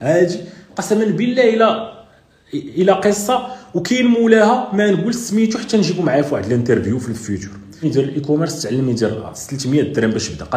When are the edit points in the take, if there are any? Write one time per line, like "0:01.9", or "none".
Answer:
0:07.8